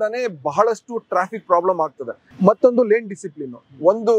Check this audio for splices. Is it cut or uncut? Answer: uncut